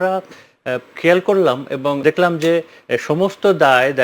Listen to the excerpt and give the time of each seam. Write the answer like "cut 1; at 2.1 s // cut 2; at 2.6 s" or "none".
cut 1; at 2.0 s